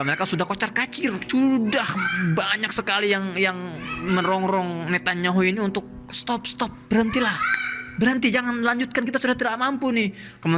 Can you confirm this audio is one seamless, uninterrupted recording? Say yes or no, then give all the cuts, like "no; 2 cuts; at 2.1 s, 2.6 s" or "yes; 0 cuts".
no; 1 cut; at 1.2 s